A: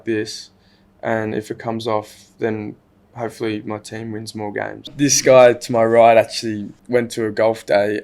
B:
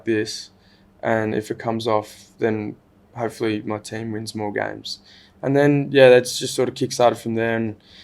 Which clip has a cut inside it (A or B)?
A